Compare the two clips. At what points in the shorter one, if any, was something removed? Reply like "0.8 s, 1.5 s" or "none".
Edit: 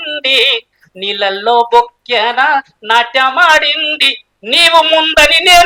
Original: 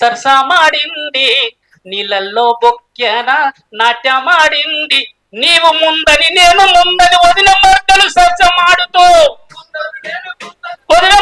none